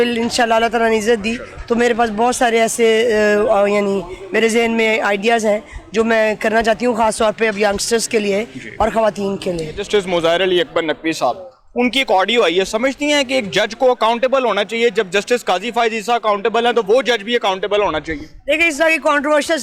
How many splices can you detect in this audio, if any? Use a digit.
1